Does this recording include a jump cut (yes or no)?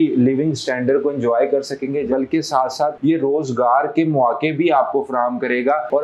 yes